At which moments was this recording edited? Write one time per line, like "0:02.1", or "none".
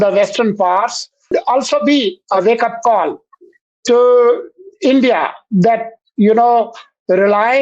0:01.3